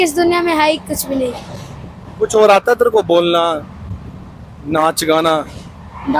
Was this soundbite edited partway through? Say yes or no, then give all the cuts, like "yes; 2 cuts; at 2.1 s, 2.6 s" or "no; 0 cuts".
no; 0 cuts